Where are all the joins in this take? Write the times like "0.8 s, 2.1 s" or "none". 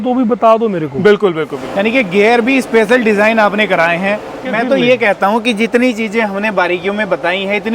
1.6 s, 4.4 s